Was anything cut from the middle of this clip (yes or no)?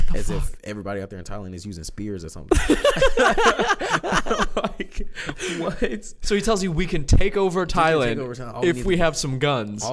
no